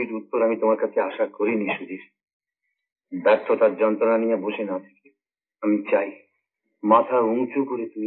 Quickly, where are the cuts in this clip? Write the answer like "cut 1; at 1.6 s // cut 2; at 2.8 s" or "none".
none